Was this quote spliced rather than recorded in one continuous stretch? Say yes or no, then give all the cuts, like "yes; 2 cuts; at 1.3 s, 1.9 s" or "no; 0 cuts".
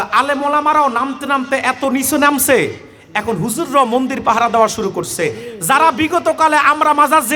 no; 0 cuts